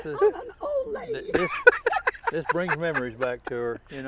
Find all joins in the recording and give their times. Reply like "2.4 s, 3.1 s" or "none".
none